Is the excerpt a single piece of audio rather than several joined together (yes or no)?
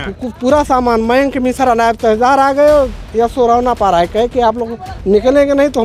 yes